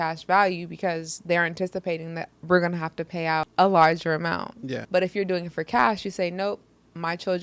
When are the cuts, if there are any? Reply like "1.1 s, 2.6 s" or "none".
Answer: 3.4 s, 4.7 s